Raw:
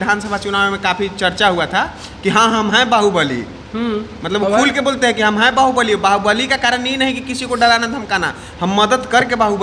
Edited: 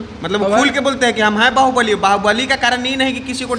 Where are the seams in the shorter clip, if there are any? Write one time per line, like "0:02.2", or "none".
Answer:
none